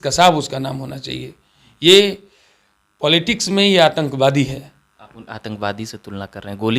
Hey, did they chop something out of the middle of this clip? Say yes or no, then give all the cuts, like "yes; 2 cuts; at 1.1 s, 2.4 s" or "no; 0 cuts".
no; 0 cuts